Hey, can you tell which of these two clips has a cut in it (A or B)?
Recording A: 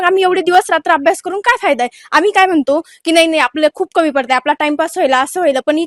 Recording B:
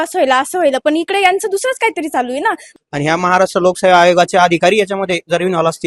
B